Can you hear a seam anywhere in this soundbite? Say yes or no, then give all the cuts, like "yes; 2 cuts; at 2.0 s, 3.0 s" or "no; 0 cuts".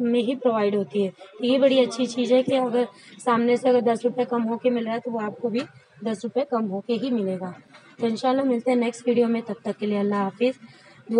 no; 0 cuts